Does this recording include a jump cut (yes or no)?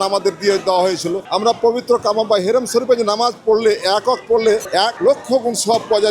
yes